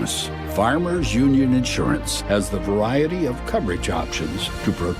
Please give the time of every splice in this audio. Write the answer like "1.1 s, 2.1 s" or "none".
none